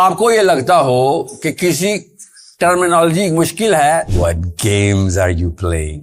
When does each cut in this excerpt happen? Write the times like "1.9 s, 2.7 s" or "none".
4.1 s